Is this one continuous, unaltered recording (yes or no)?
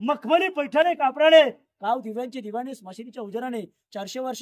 yes